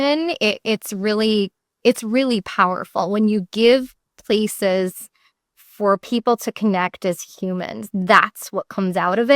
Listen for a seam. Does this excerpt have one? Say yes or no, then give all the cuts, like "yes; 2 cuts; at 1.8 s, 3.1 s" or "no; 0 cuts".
yes; 1 cut; at 1.6 s